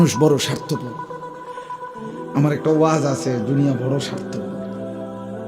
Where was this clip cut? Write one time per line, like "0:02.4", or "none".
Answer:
0:04.1

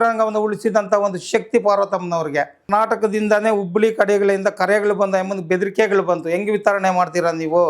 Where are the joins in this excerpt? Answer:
0:02.6

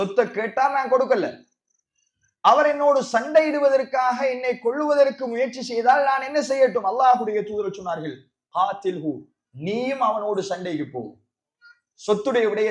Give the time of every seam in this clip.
none

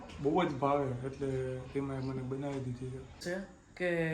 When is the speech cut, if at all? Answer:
0:03.2

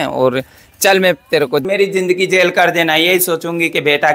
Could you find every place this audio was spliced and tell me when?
0:01.6

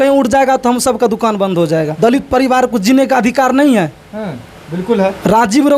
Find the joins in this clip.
0:01.9

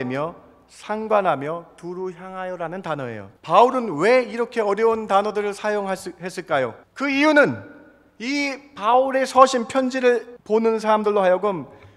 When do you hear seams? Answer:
0:03.2
0:06.8
0:10.3

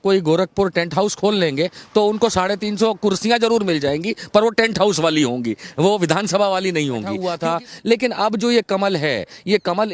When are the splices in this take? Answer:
0:07.3

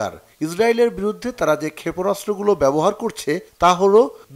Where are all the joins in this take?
none

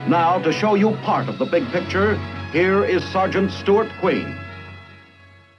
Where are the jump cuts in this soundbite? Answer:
none

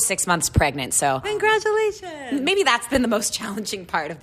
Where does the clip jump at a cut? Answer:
0:01.2
0:02.9

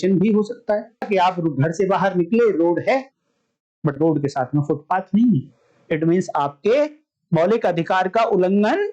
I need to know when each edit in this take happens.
0:01.1

